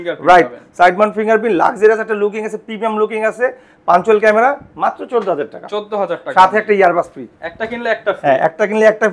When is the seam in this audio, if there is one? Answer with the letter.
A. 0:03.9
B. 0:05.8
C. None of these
C